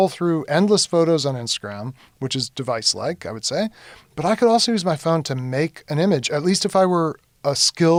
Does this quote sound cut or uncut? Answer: uncut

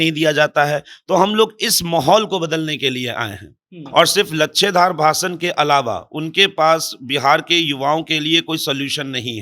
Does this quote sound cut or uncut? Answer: cut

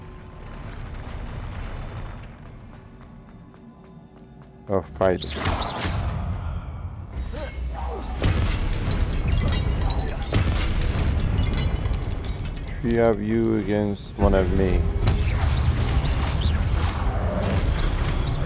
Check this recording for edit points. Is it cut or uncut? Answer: uncut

